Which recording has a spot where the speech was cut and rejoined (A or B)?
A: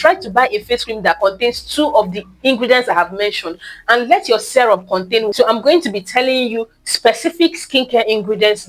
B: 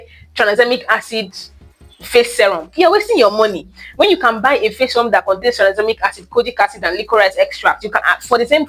A